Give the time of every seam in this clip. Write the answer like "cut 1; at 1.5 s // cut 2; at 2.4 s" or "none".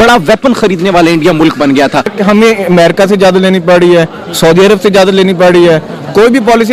cut 1; at 2.1 s